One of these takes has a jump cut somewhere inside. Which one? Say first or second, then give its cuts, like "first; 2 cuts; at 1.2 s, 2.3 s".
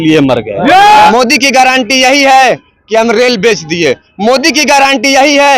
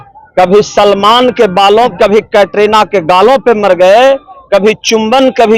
first; 1 cut; at 1.1 s